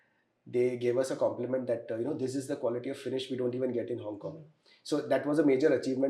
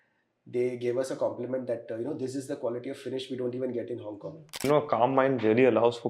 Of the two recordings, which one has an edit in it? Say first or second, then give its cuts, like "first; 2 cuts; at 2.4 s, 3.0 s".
second; 1 cut; at 4.5 s